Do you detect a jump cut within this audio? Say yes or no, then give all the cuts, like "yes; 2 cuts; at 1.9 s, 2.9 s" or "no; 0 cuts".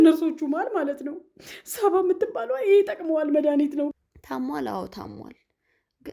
yes; 1 cut; at 3.9 s